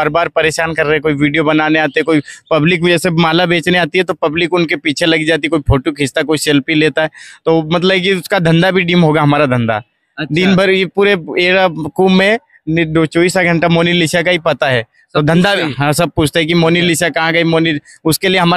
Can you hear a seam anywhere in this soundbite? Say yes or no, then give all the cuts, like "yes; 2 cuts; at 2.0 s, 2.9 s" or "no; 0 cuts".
no; 0 cuts